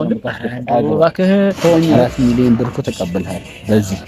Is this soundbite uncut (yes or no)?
no